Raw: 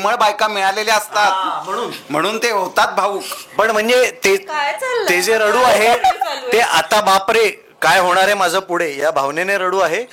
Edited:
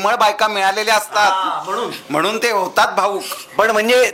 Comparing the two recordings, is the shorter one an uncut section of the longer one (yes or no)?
yes